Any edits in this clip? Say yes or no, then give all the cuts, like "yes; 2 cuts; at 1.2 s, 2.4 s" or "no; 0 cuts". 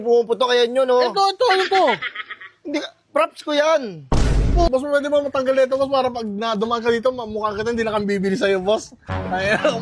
yes; 1 cut; at 4.7 s